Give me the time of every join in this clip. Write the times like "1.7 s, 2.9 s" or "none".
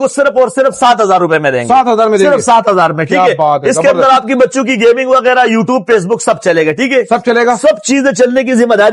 none